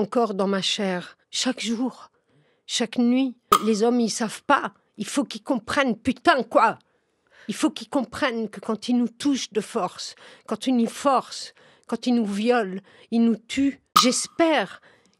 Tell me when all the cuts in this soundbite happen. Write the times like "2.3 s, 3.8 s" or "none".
3.6 s, 13.9 s